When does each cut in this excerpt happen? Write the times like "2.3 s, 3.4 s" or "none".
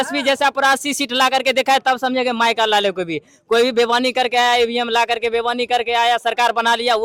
none